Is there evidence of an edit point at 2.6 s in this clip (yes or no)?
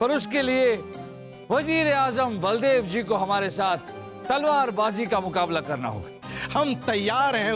no